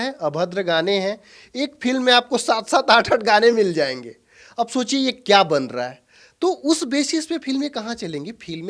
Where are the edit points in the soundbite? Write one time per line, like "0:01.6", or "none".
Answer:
none